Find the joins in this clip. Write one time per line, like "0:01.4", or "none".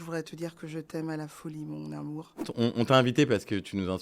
0:02.5